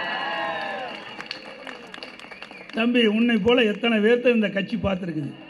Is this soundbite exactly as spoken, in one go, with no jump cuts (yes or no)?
yes